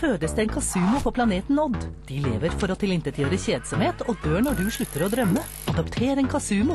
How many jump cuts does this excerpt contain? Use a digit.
1